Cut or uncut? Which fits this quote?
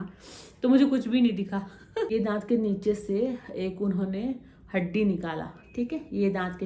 cut